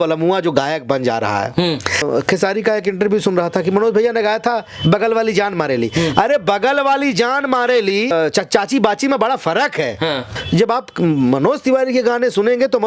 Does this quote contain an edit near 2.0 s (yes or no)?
yes